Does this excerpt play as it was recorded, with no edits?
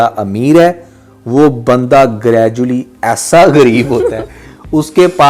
yes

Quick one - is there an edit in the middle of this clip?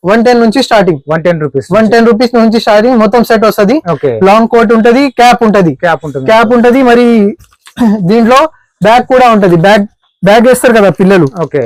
no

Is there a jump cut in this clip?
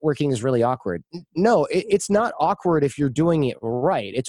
no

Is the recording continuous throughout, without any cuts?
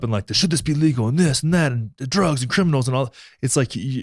yes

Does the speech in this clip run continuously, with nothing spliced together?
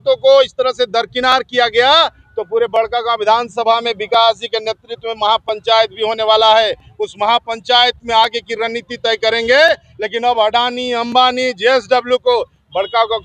yes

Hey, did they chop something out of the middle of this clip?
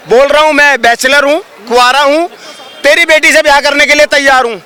no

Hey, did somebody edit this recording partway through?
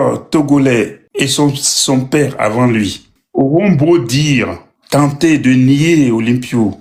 no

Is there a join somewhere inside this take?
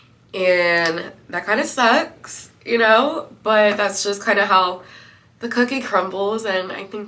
no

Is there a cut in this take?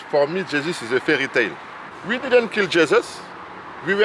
yes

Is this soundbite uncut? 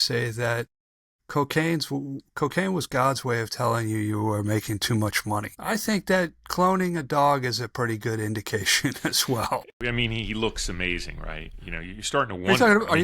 no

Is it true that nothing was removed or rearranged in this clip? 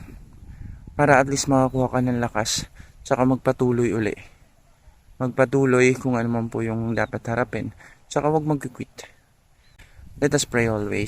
no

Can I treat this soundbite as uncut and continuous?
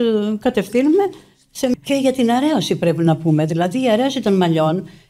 no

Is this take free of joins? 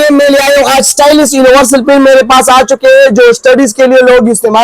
yes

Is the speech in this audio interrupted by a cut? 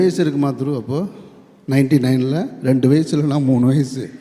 no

